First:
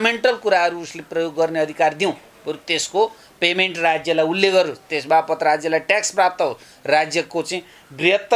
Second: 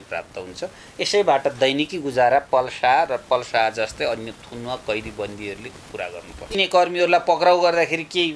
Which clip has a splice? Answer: second; 1 cut; at 6.5 s

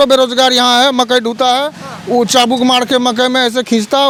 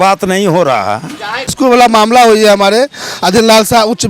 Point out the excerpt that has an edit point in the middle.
second; 1 cut; at 1.5 s

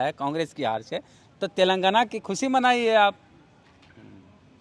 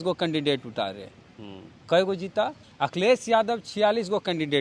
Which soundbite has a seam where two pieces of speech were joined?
second; 1 cut; at 2.6 s

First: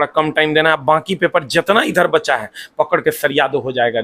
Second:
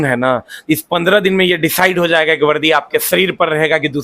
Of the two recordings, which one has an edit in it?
second; 1 cut; at 3.1 s

